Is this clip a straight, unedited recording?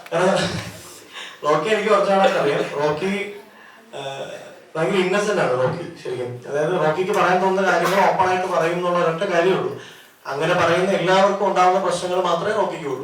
yes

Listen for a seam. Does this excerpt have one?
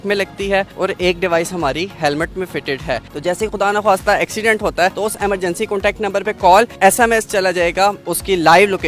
yes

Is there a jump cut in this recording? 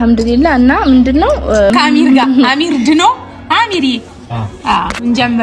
yes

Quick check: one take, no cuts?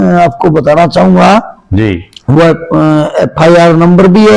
yes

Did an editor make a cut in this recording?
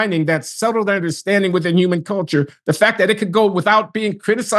no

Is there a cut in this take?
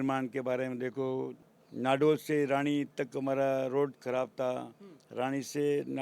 yes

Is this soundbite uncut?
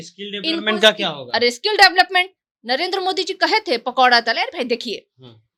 yes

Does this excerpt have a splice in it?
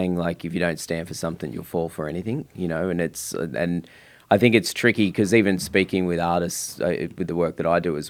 no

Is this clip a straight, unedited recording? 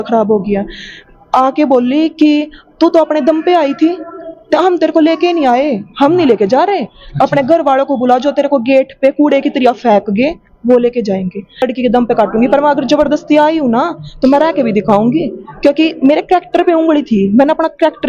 no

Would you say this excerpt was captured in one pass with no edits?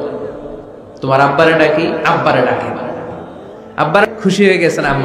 no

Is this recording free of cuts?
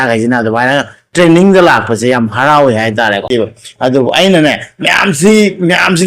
no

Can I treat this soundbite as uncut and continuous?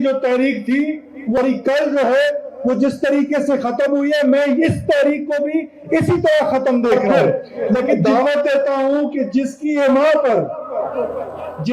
no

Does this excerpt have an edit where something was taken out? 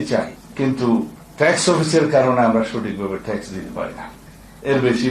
yes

